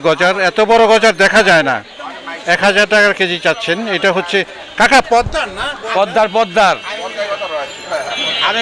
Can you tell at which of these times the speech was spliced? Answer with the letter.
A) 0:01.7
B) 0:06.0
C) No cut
C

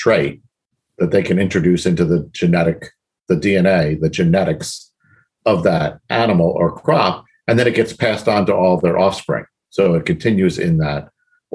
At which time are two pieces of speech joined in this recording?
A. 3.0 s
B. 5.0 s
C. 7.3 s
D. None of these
D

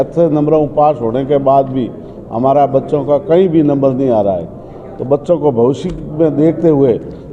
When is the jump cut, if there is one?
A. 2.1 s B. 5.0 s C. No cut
C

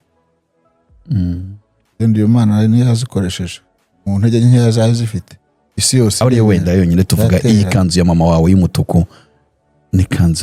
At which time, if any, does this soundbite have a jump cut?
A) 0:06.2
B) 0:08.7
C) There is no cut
A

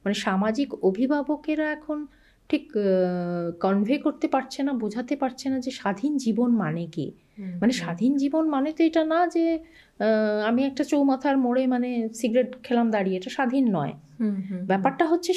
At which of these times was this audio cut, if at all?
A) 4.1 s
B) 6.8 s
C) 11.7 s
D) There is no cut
D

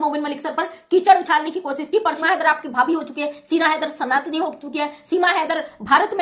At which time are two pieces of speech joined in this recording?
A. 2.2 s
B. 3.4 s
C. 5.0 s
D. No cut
A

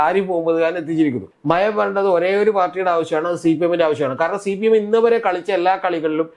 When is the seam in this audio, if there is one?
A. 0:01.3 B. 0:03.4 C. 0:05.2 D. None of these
A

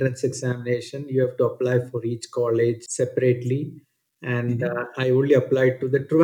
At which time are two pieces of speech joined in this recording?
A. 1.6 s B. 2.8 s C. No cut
B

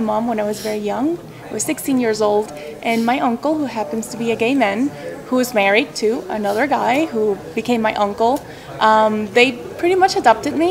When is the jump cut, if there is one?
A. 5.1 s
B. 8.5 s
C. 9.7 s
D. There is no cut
D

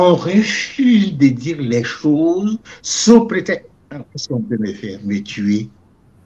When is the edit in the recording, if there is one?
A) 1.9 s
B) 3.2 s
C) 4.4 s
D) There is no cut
D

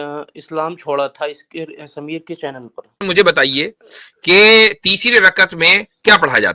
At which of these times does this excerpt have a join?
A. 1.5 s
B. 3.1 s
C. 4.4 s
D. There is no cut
B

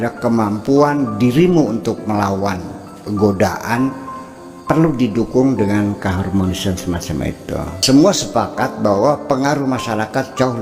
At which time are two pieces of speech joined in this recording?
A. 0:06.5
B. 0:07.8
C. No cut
B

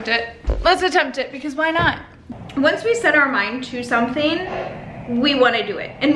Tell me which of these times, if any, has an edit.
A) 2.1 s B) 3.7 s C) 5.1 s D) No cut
A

